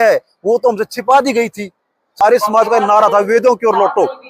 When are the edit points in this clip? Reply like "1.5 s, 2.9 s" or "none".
2.1 s